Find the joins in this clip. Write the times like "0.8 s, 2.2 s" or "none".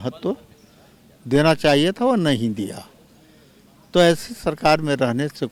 none

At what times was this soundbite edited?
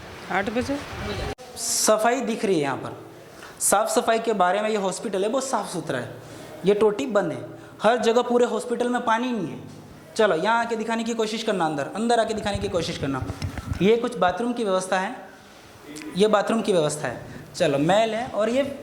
1.4 s

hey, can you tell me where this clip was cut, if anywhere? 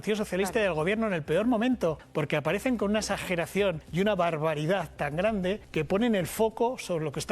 2.0 s, 3.8 s, 5.6 s

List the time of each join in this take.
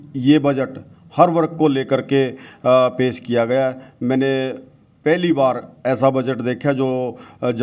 none

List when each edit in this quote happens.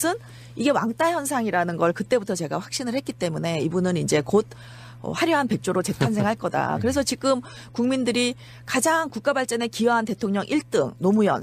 4.5 s

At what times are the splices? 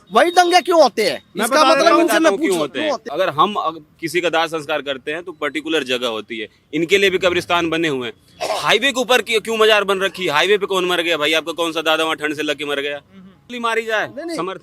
3.0 s, 13.6 s

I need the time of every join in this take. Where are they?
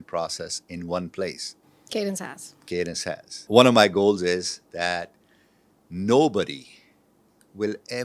3.5 s

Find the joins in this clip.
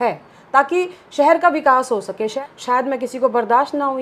2.4 s

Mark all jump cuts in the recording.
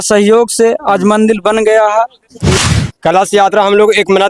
2.4 s

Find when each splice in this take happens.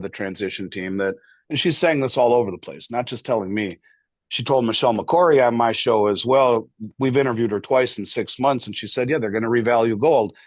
none

